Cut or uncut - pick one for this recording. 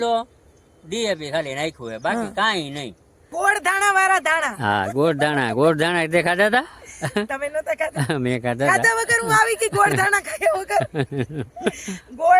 cut